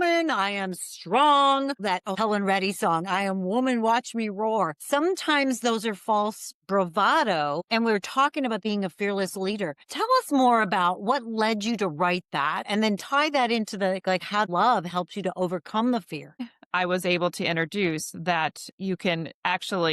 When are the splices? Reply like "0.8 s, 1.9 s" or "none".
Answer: 8.6 s, 12.6 s, 14.5 s, 16.5 s

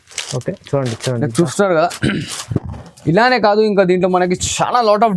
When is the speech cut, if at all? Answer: none

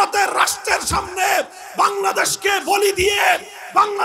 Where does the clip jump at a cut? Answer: none

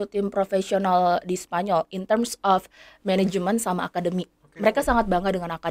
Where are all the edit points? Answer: none

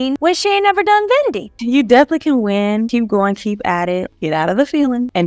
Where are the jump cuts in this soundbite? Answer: 1.5 s, 2.9 s, 4.1 s

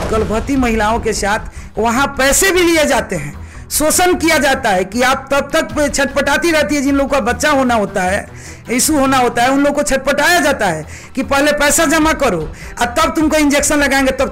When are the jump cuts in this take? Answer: none

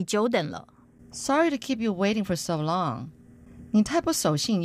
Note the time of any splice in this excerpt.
3.3 s

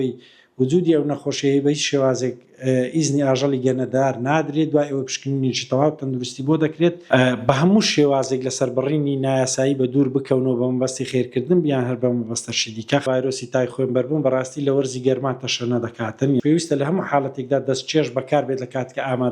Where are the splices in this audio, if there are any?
7.0 s, 13.0 s, 16.4 s

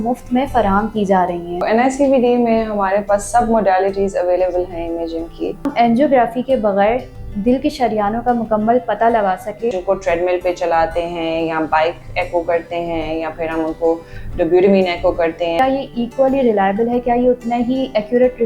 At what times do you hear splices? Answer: 1.6 s, 5.7 s, 9.8 s, 15.6 s

